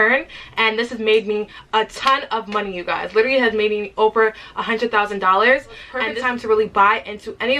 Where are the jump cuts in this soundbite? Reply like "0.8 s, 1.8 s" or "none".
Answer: 5.8 s